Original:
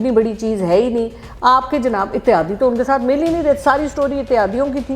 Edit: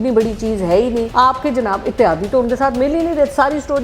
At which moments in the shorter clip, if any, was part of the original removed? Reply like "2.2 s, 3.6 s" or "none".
1.1 s